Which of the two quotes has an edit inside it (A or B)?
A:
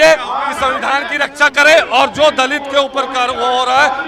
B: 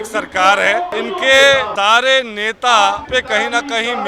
B